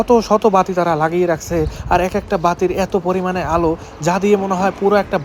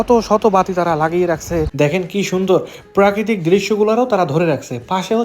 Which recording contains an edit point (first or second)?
second